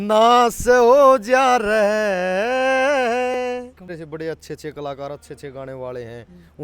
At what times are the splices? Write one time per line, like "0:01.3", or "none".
0:03.8